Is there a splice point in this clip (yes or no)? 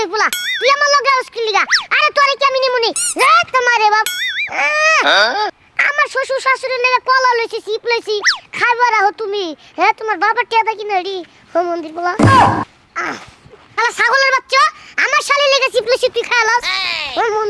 no